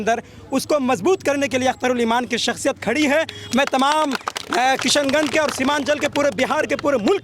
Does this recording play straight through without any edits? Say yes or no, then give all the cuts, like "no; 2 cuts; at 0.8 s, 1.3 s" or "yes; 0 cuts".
yes; 0 cuts